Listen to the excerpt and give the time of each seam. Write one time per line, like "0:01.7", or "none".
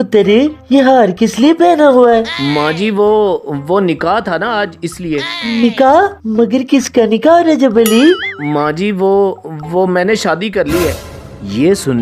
none